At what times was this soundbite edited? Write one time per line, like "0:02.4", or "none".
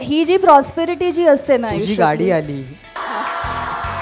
0:03.0